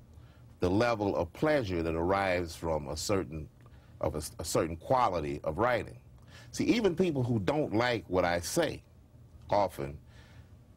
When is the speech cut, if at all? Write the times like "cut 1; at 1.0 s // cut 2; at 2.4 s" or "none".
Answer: none